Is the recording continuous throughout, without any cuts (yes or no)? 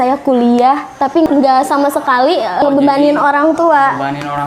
no